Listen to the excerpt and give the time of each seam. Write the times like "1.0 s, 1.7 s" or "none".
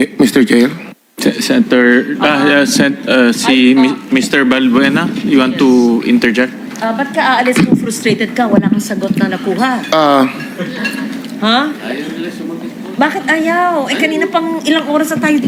none